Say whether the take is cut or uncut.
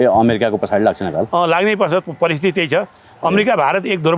uncut